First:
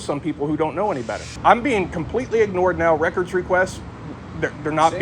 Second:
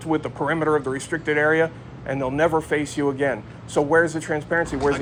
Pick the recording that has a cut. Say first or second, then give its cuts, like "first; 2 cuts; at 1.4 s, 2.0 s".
first; 1 cut; at 1.3 s